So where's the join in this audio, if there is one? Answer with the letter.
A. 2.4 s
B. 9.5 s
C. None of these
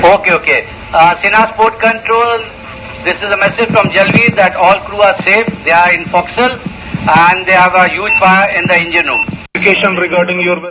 B